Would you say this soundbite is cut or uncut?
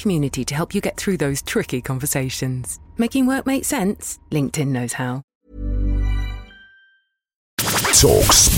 cut